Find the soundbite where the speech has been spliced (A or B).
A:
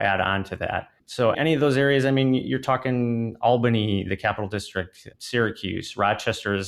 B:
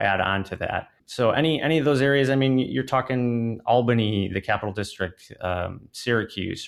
A